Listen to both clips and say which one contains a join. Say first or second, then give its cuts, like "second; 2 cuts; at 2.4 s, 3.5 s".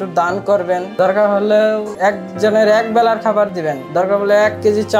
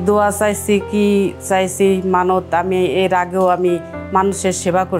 first; 3 cuts; at 0.9 s, 1.9 s, 3.8 s